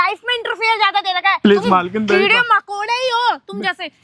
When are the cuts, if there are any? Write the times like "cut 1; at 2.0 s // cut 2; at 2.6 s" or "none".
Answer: cut 1; at 1.4 s